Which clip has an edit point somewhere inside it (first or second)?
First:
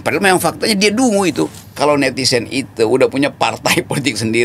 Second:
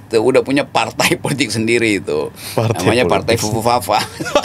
first